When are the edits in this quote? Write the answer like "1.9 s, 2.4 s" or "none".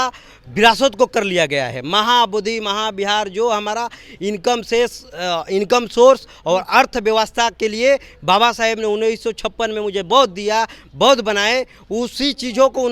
none